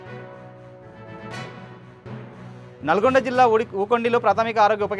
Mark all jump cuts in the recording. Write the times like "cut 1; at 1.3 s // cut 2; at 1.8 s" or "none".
cut 1; at 1.1 s